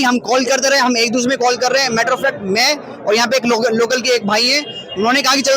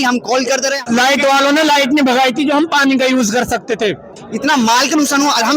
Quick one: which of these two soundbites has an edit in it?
second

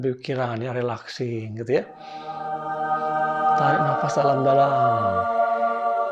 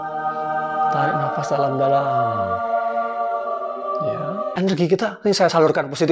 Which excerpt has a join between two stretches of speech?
second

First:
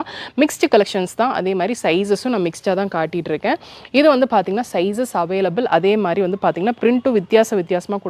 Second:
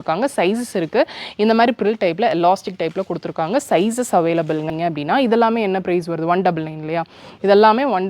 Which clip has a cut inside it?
second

